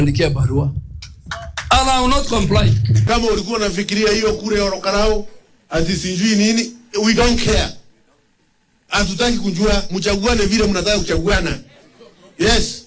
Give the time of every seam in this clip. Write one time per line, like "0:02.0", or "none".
0:03.0